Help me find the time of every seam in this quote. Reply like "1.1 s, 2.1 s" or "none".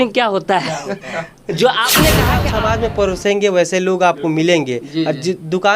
2.5 s